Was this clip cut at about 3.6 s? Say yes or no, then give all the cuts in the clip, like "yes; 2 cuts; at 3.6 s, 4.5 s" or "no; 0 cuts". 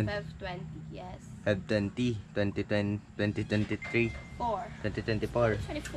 yes; 1 cut; at 3.6 s